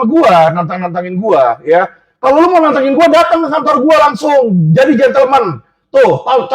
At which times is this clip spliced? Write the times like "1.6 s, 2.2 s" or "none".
none